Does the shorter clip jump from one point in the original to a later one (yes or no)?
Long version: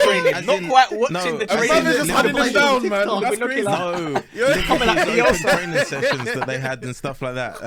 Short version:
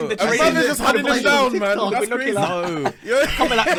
no